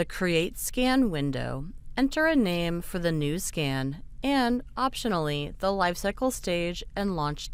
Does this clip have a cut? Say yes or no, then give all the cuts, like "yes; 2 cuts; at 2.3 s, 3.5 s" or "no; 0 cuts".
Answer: no; 0 cuts